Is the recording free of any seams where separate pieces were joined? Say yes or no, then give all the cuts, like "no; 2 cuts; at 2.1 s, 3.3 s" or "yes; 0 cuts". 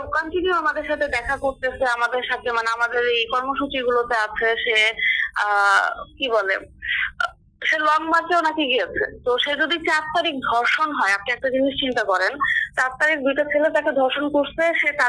yes; 0 cuts